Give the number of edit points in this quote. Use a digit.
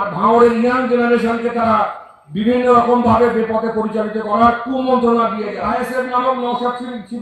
1